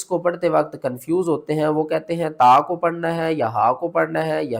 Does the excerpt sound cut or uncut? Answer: uncut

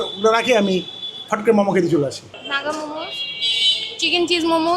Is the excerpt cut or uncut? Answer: cut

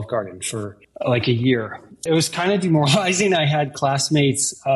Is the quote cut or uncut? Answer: cut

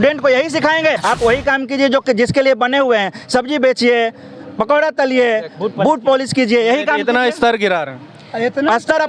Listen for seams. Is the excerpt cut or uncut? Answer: cut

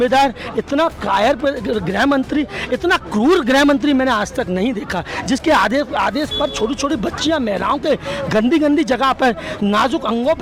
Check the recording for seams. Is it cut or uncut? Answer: uncut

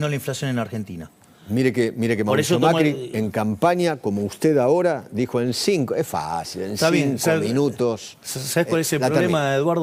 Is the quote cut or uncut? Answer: uncut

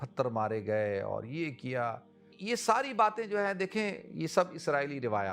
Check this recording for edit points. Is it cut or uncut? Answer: cut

